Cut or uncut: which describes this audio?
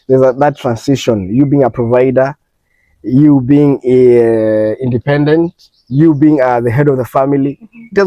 uncut